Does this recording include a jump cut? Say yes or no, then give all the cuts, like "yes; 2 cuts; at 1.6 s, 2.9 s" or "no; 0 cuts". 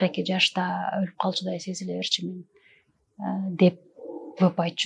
no; 0 cuts